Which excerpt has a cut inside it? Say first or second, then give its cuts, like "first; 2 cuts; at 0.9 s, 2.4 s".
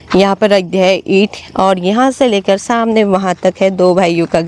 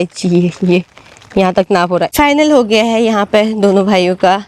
second; 1 cut; at 2.1 s